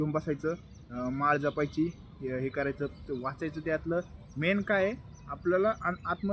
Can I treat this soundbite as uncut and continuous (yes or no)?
yes